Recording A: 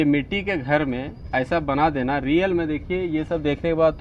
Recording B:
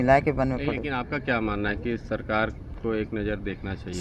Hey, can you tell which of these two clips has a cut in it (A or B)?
B